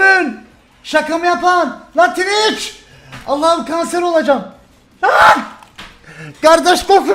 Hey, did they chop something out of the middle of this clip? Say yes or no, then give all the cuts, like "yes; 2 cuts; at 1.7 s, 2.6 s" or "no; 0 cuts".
yes; 1 cut; at 3.0 s